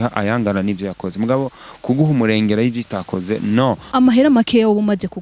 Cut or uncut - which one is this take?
cut